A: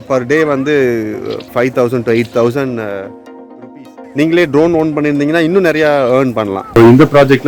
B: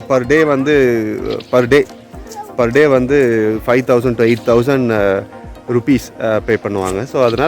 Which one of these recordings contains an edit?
A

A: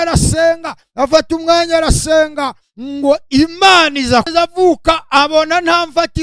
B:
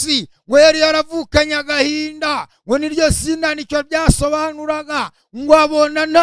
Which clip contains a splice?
A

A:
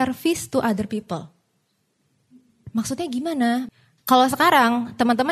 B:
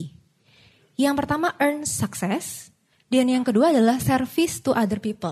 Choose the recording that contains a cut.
A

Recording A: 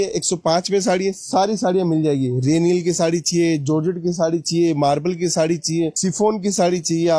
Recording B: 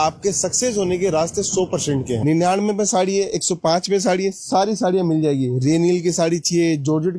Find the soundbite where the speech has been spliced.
B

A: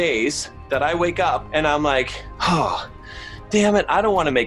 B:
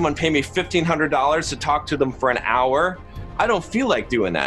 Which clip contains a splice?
A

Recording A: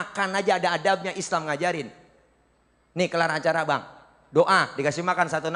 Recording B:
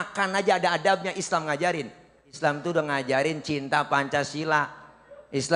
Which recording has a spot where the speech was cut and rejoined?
B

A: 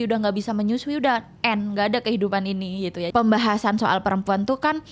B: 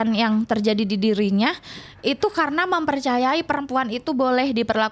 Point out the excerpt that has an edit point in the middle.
A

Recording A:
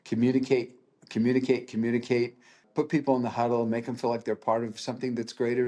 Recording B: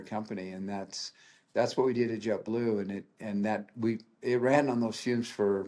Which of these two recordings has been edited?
A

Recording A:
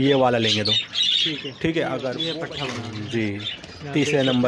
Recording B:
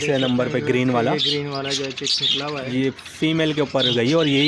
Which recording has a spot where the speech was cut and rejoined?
A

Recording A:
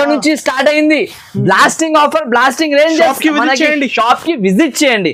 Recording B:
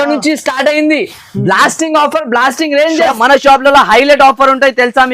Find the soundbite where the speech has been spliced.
B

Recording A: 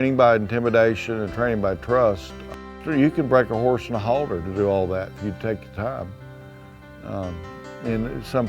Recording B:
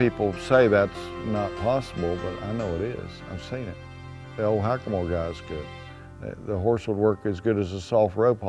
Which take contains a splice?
A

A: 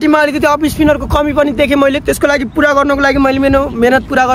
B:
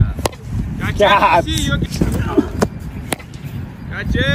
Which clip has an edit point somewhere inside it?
B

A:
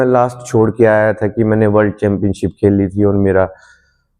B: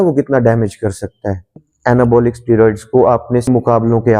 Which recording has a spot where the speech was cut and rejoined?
B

